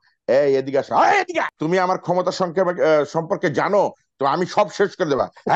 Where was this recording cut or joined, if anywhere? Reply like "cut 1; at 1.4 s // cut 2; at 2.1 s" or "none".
cut 1; at 1.5 s

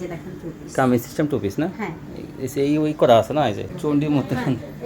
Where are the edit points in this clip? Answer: cut 1; at 3.7 s

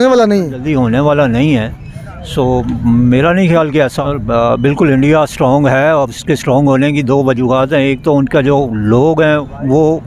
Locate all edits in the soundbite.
cut 1; at 4.0 s

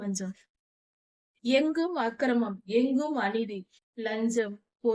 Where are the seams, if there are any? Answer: none

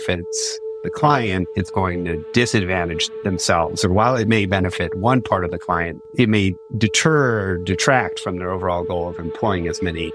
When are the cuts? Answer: none

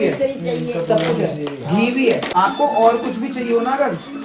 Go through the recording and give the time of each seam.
cut 1; at 2.3 s

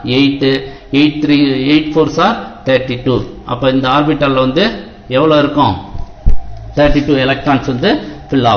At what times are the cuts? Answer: none

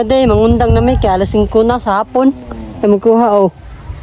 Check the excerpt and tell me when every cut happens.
none

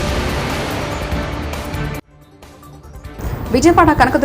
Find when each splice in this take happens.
cut 1; at 2.2 s

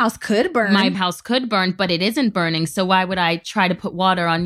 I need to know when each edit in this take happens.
none

